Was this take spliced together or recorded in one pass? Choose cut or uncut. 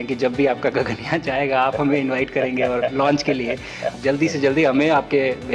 cut